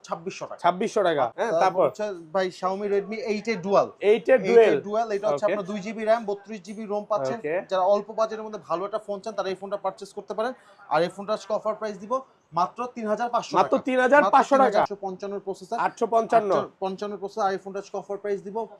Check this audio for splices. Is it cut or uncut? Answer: cut